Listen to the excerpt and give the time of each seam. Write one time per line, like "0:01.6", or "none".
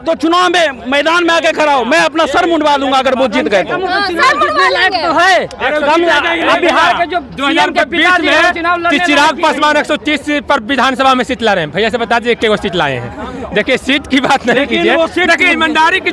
none